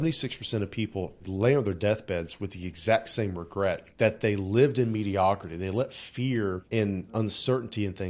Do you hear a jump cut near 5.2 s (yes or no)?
no